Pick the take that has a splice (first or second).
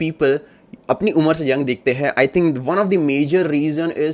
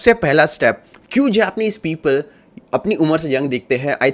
second